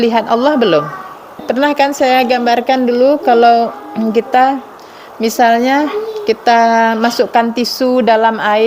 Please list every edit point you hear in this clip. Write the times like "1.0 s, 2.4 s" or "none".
1.4 s